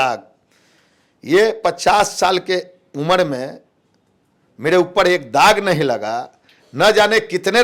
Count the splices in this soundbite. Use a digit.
0